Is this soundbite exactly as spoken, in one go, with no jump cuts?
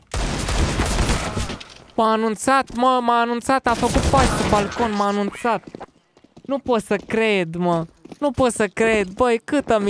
yes; 0 cuts

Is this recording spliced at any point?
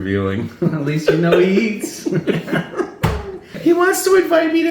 yes; 1 cut; at 3.6 s

